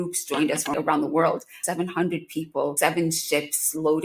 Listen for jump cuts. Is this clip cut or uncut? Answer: cut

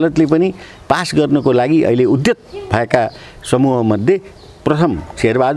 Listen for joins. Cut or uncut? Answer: uncut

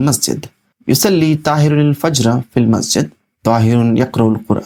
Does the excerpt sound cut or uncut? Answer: uncut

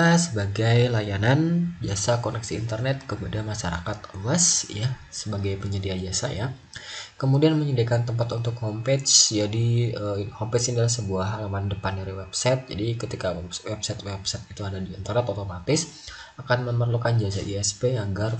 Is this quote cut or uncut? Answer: uncut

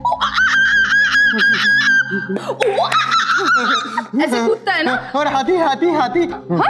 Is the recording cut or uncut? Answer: uncut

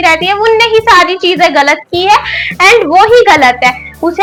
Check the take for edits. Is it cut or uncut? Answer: uncut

